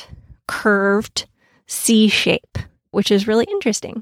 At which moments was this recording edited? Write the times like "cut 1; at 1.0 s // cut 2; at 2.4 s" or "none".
cut 1; at 2.9 s